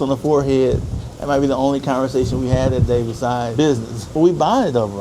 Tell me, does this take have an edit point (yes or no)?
yes